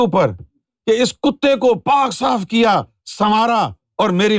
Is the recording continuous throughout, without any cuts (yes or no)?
yes